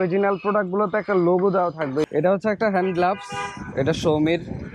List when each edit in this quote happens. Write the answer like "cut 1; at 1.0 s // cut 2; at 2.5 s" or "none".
cut 1; at 2.1 s